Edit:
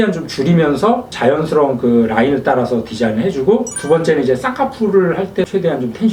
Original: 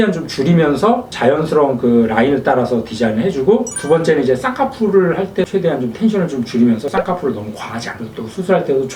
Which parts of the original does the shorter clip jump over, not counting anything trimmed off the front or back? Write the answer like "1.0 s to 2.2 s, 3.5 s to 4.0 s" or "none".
none